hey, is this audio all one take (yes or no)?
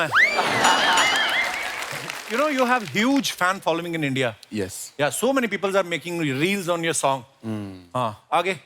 no